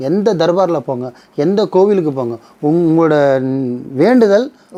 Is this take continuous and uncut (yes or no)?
yes